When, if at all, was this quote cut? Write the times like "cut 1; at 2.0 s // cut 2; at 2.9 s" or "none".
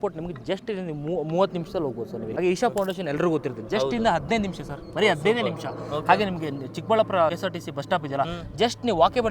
cut 1; at 2.3 s // cut 2; at 7.3 s

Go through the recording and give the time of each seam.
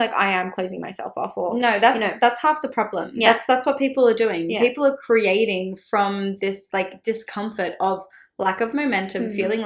none

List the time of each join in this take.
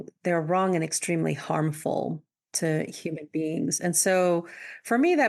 none

